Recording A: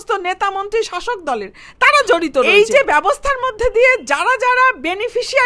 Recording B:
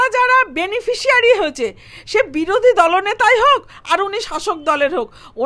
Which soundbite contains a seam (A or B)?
A